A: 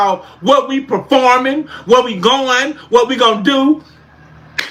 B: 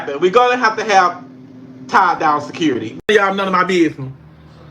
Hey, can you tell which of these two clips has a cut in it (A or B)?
B